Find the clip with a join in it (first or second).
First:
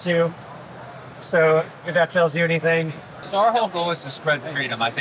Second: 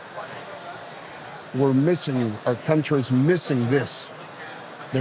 first